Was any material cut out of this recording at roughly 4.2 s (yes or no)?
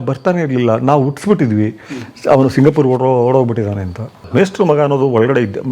yes